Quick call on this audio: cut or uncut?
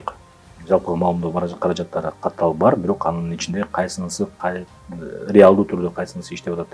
uncut